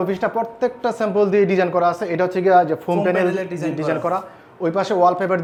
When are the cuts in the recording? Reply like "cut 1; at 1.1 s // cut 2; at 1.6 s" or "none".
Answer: none